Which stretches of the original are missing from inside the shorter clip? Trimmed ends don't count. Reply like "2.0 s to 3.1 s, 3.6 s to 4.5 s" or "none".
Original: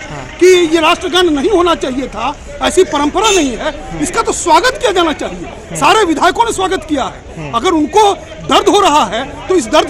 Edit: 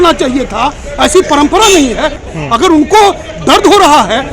3.9 s to 7.3 s